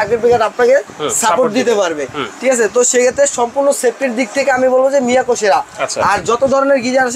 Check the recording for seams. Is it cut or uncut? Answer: uncut